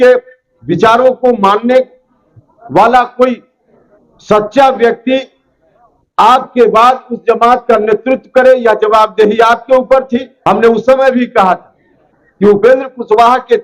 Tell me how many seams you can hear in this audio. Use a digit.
1